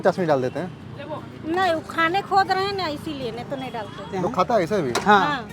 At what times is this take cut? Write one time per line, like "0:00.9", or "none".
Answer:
0:04.1